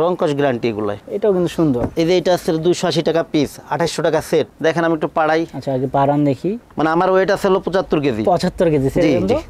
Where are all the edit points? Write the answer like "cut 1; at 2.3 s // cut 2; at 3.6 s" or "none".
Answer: cut 1; at 1.0 s // cut 2; at 4.5 s // cut 3; at 6.7 s